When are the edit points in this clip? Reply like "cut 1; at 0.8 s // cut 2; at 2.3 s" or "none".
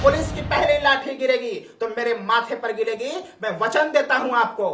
none